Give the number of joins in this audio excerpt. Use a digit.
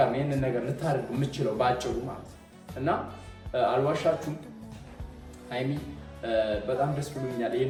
0